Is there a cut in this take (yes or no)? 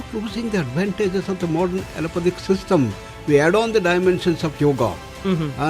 no